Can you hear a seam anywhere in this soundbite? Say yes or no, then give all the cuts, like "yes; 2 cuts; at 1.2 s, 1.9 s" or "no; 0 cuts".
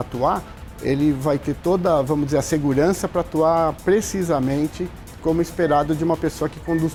no; 0 cuts